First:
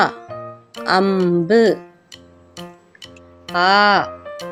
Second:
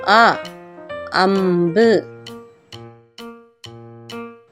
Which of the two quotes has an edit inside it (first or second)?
second